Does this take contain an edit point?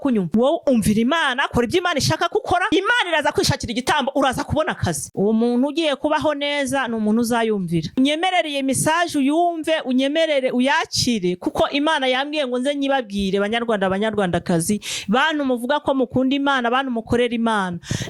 yes; 2 cuts; at 5.1 s, 8.0 s

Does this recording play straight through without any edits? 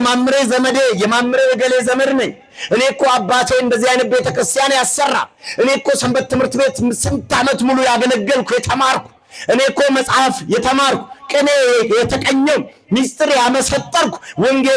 yes; 0 cuts

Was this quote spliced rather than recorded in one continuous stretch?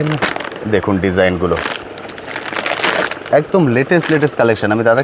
no; 0 cuts

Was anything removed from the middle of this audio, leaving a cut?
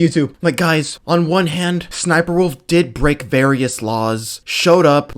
yes; 2 cuts; at 0.9 s, 1.9 s

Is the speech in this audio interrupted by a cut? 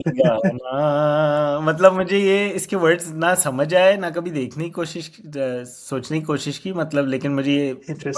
no; 0 cuts

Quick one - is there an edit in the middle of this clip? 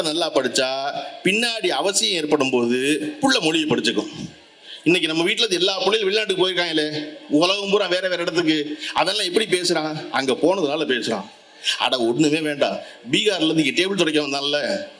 no; 0 cuts

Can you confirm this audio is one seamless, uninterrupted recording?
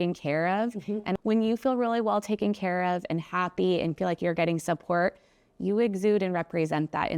no; 1 cut; at 1.2 s

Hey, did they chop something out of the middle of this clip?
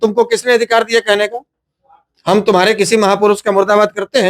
no; 0 cuts

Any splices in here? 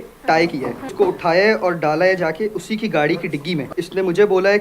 yes; 2 cuts; at 0.9 s, 3.7 s

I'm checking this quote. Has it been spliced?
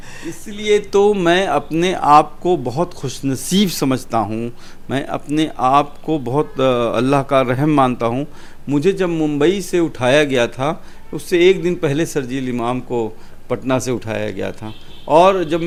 no; 0 cuts

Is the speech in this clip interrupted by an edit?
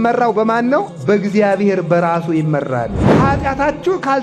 yes; 2 cuts; at 0.9 s, 3.0 s

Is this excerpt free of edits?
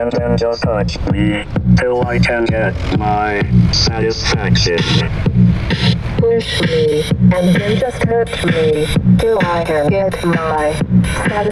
yes; 0 cuts

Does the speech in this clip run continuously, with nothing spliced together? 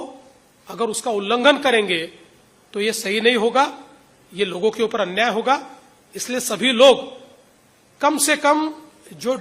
yes; 0 cuts

